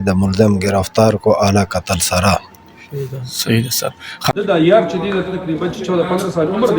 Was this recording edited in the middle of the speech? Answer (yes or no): yes